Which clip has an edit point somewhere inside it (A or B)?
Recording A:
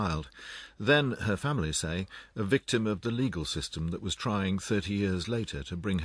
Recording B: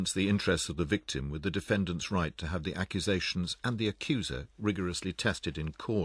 B